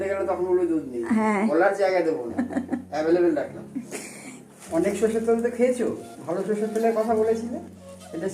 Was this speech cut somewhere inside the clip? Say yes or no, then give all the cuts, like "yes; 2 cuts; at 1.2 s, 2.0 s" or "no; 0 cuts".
yes; 2 cuts; at 1.5 s, 4.5 s